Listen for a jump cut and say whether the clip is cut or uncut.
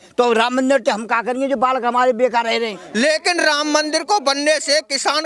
cut